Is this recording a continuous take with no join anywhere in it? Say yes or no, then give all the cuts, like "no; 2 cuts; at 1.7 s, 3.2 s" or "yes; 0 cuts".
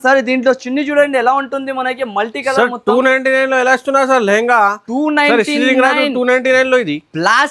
yes; 0 cuts